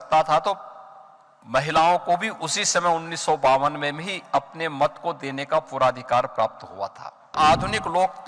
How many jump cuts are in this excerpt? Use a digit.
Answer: 1